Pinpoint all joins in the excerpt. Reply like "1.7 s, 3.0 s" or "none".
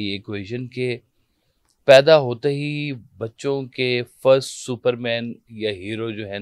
none